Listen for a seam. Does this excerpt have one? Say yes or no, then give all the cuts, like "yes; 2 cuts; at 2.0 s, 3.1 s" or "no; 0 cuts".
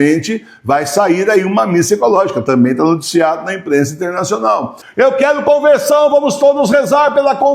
yes; 1 cut; at 4.8 s